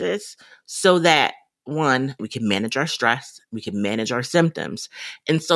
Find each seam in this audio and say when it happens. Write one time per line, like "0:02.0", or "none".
0:02.2